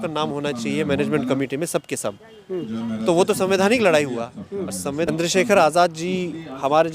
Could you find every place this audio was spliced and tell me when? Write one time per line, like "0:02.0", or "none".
0:05.1